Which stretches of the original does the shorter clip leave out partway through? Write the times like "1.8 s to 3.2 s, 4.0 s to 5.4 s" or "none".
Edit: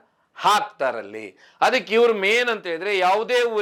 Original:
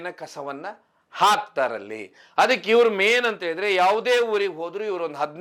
none